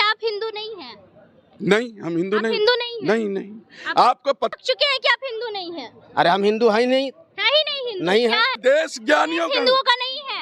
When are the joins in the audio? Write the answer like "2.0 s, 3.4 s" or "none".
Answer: 4.5 s, 8.6 s